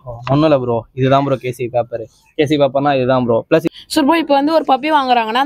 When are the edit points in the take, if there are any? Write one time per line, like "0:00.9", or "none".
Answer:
0:03.7